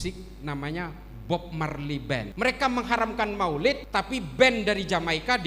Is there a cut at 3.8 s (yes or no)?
yes